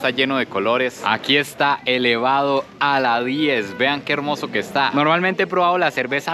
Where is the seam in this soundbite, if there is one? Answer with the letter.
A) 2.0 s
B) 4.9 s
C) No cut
B